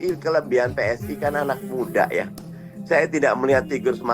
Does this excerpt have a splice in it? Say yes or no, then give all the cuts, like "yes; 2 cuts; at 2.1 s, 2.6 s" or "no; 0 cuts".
no; 0 cuts